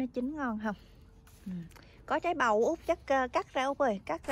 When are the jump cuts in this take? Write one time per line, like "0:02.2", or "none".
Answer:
none